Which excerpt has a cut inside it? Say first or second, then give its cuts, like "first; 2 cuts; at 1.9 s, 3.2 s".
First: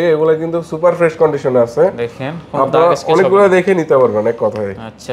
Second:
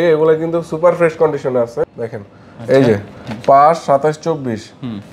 second; 1 cut; at 1.8 s